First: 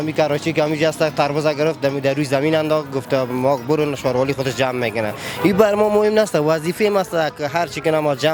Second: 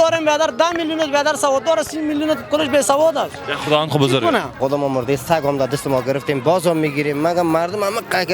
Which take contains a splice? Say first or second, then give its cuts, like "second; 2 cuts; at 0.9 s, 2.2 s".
second; 1 cut; at 4.6 s